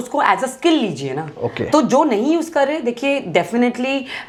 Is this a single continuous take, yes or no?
yes